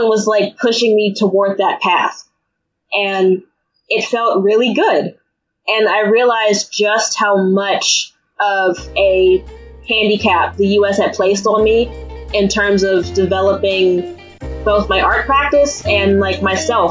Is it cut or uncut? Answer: uncut